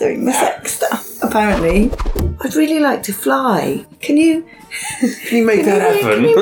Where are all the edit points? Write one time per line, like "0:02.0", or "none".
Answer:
0:02.1
0:03.9